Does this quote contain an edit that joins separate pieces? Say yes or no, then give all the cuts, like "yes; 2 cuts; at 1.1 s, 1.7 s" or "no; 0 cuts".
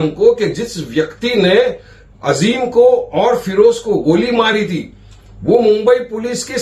no; 0 cuts